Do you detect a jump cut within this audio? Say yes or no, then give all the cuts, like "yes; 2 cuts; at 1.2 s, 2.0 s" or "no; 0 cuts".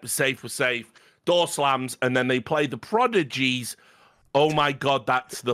no; 0 cuts